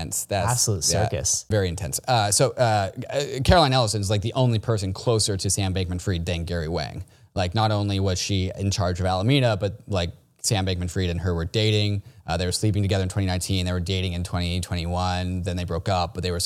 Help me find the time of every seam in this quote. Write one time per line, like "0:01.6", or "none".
0:01.5

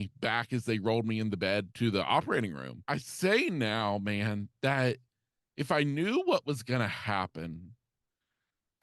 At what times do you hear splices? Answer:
0:01.7
0:02.7

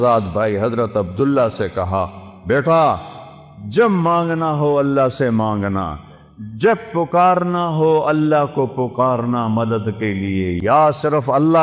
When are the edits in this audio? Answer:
0:10.6

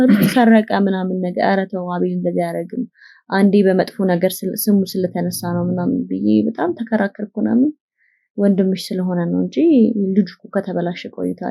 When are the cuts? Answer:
none

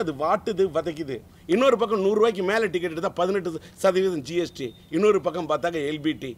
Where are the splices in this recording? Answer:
0:01.3

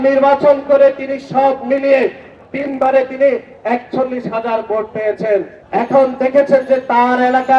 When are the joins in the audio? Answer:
none

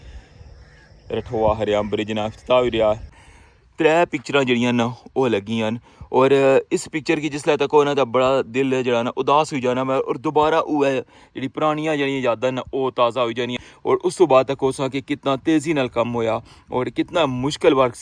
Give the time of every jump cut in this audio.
0:03.2
0:13.6

